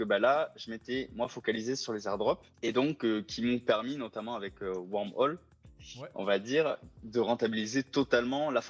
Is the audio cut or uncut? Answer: cut